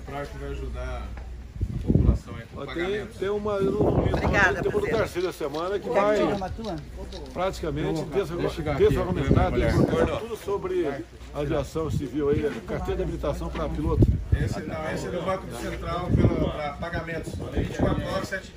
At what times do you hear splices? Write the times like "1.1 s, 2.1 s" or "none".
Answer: none

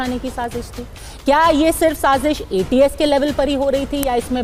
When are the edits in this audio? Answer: none

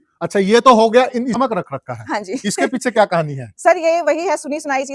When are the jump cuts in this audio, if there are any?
1.4 s

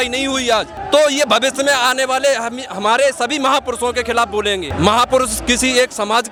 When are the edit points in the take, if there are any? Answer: none

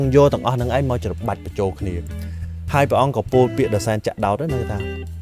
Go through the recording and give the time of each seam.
none

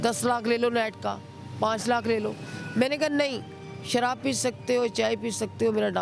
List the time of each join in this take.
none

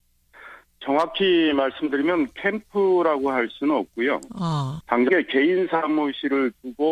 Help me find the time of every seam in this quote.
none

